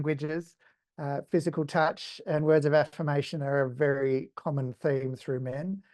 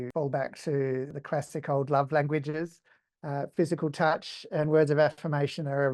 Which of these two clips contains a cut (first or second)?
second